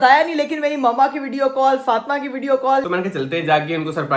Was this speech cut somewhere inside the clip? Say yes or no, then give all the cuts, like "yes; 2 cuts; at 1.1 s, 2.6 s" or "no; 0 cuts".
yes; 1 cut; at 2.8 s